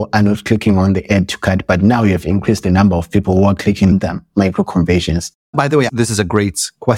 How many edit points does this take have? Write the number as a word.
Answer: one